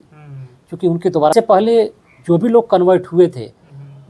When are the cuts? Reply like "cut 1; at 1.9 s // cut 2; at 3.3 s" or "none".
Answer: cut 1; at 1.3 s